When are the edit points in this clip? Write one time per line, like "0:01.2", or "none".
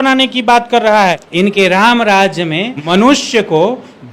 0:01.0
0:02.7